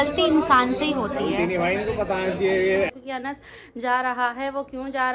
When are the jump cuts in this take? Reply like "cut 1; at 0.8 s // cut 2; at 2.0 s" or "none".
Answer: cut 1; at 2.9 s